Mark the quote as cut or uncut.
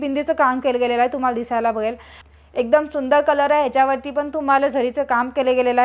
cut